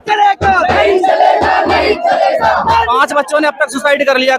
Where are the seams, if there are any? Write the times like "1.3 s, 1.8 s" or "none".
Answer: 2.9 s